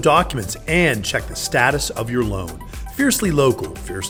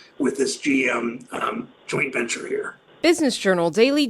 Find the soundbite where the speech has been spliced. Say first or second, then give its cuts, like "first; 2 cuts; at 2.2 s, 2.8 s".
second; 1 cut; at 2.8 s